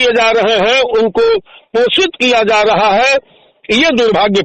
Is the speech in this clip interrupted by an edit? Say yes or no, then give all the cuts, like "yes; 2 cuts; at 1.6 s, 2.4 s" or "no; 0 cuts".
no; 0 cuts